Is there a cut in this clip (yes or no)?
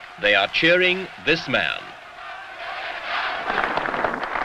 yes